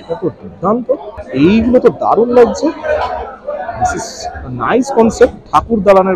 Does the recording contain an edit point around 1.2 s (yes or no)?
yes